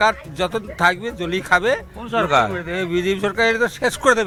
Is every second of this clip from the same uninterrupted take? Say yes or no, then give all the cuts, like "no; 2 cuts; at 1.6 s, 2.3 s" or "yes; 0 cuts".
yes; 0 cuts